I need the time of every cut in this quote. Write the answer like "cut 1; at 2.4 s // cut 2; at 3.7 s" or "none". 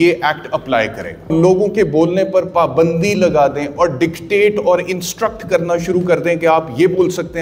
cut 1; at 1.3 s